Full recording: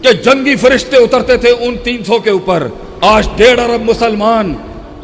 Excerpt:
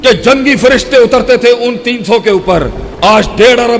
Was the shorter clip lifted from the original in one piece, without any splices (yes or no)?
yes